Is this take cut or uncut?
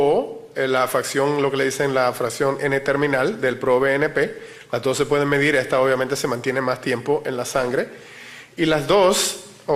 uncut